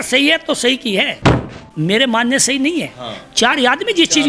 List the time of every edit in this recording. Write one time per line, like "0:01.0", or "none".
0:01.5